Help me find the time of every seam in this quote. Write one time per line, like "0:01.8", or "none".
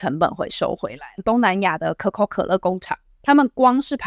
0:01.2